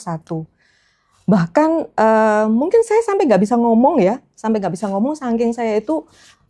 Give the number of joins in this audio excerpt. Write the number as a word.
zero